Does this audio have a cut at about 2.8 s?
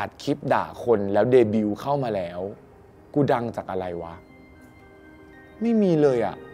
no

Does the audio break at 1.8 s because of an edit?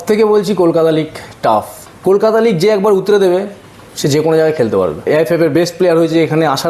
yes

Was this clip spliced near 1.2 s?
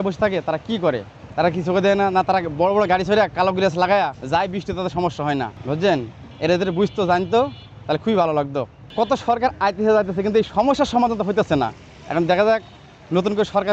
yes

